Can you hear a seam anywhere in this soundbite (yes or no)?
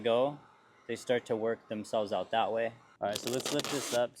yes